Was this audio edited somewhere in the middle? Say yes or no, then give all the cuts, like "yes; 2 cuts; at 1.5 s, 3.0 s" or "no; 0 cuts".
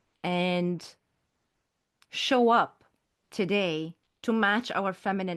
yes; 1 cut; at 4.0 s